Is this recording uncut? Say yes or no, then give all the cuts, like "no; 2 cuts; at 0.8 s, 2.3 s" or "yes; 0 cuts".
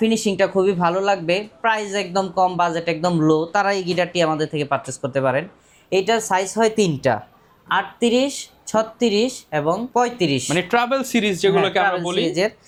yes; 0 cuts